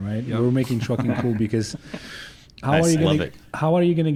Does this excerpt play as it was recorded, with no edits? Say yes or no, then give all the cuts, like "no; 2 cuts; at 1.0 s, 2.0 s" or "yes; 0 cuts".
yes; 0 cuts